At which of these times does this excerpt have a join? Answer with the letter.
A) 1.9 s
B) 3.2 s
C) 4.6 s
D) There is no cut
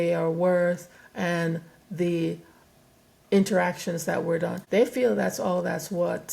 C